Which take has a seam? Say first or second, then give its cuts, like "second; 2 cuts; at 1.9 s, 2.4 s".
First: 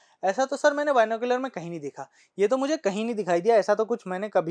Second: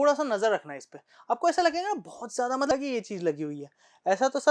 second; 1 cut; at 2.7 s